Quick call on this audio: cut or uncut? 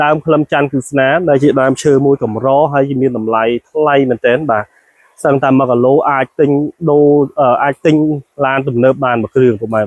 uncut